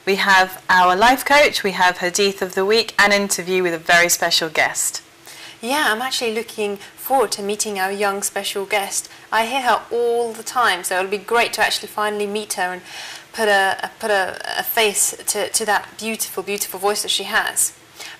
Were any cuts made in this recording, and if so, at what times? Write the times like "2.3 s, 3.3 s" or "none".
none